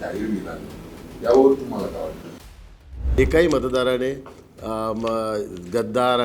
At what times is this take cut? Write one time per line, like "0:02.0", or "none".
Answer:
0:02.6